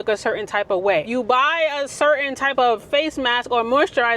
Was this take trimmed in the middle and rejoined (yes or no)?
yes